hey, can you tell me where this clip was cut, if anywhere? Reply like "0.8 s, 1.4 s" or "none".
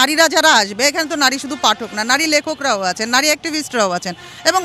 none